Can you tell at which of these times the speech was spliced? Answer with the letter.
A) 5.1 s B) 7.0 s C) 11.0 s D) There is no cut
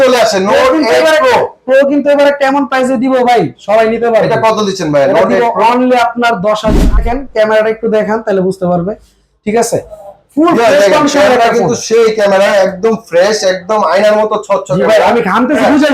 B